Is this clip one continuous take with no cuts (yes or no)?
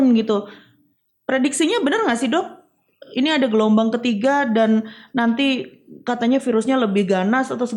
yes